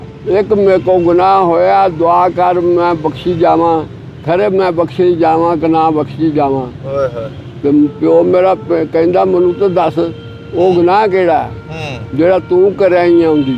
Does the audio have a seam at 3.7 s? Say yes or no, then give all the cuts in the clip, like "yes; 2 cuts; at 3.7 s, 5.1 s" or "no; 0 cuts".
no; 0 cuts